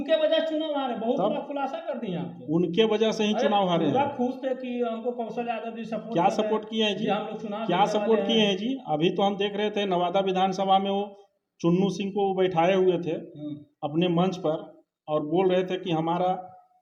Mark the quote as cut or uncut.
uncut